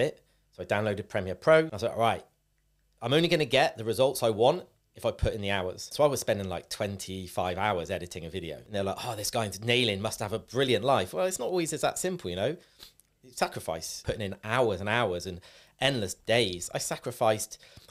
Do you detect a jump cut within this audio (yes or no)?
yes